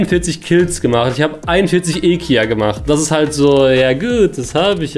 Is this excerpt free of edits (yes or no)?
yes